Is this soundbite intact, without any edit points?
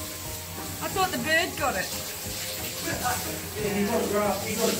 yes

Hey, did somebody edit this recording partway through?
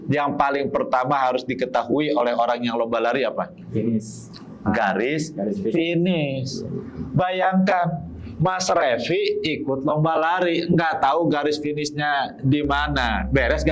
no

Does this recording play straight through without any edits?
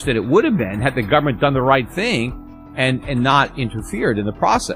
yes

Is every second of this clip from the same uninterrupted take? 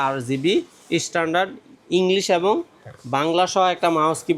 yes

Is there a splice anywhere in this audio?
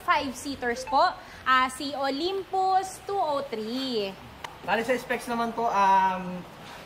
no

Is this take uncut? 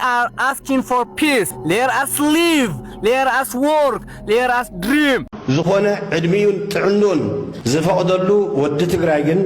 no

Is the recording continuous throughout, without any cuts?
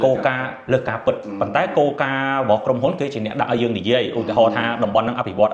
yes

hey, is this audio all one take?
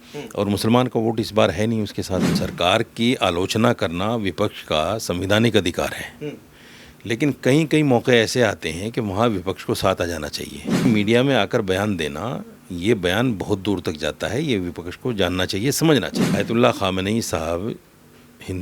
no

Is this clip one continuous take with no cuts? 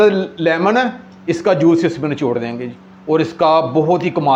yes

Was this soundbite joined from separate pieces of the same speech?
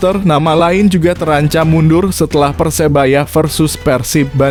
no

